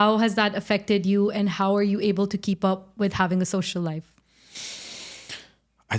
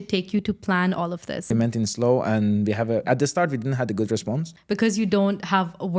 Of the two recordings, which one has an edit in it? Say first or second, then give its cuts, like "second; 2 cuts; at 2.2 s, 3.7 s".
second; 2 cuts; at 1.4 s, 4.5 s